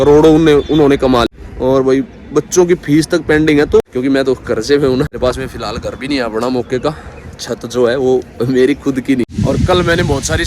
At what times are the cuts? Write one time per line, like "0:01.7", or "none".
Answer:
0:01.3
0:03.8
0:05.2
0:09.2